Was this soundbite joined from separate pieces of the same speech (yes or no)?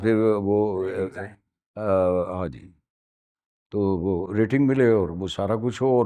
no